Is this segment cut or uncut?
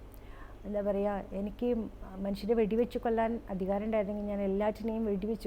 uncut